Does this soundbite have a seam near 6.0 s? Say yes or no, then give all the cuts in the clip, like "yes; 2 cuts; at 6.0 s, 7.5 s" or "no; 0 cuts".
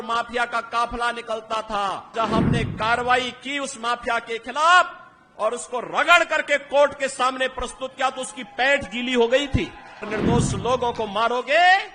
no; 2 cuts; at 2.1 s, 10.1 s